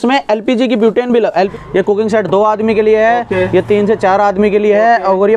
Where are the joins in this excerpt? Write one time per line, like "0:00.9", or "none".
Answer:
0:01.5